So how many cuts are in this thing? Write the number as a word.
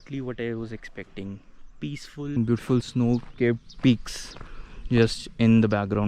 one